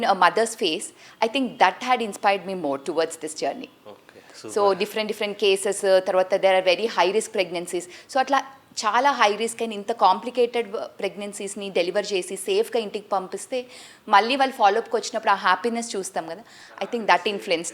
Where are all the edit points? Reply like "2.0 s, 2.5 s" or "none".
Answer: none